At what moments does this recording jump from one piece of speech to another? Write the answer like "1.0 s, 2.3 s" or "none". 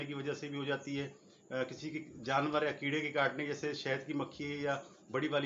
none